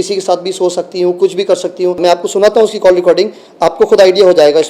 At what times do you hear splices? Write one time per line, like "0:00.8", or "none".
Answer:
0:02.0